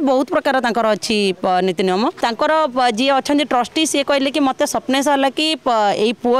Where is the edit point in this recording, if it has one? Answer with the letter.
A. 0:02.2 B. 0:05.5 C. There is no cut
A